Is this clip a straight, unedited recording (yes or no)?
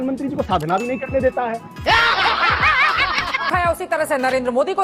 no